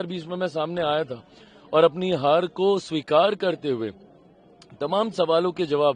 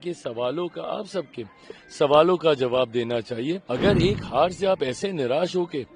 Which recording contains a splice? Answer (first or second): second